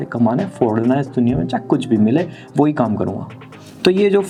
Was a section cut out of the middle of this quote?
no; 0 cuts

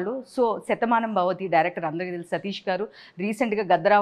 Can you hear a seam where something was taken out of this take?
no; 0 cuts

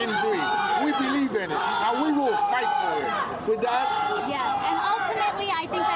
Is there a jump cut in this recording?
no; 0 cuts

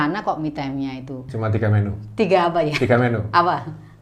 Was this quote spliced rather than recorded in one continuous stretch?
yes; 1 cut; at 1.2 s

